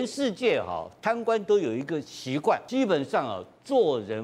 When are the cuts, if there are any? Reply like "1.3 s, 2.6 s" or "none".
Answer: 2.6 s